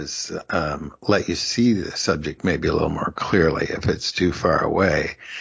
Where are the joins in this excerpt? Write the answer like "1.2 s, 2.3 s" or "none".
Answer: none